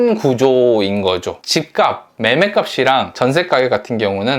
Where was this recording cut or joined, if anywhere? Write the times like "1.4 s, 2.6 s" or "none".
1.4 s